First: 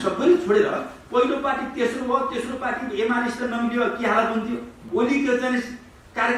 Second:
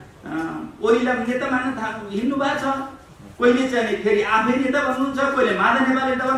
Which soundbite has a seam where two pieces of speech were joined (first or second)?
first